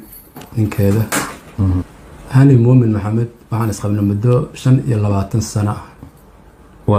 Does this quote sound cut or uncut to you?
uncut